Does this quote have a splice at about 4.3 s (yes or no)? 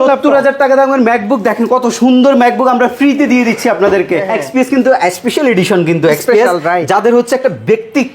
yes